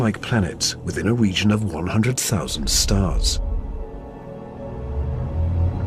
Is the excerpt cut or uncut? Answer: cut